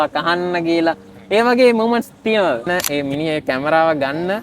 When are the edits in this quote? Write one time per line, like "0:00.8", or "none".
0:02.6